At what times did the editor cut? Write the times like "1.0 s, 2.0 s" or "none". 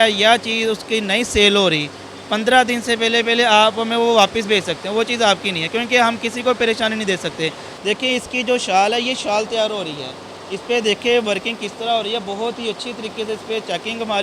7.7 s

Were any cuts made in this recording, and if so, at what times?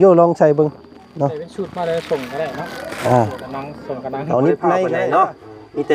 4.9 s

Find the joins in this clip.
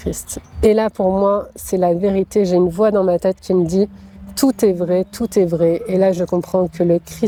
none

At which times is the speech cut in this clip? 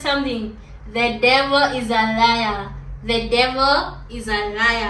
none

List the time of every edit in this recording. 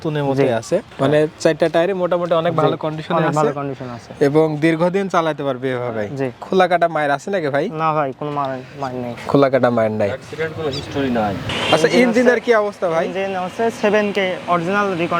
0.9 s, 6.4 s, 11.5 s

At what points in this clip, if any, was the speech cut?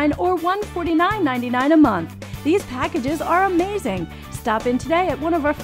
2.6 s

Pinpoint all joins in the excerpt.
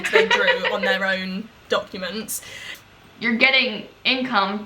2.7 s

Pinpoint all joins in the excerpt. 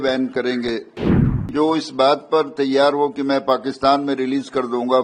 1.2 s

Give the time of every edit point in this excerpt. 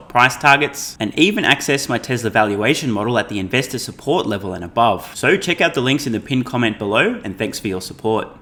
none

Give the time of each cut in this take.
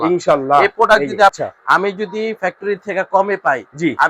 1.4 s

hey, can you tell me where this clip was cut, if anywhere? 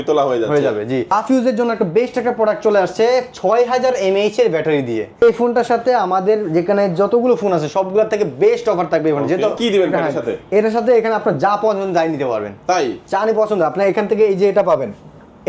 1.1 s, 5.2 s, 9.6 s

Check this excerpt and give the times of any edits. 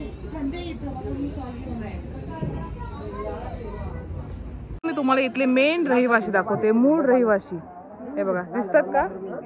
4.8 s

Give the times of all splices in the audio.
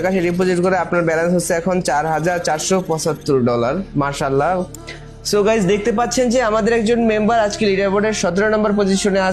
4.7 s

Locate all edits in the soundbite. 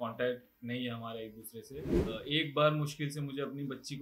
2.0 s

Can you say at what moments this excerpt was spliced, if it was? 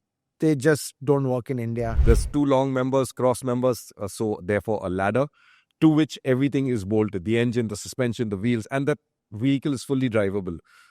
1.9 s

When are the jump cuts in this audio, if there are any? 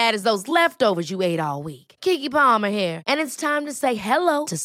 none

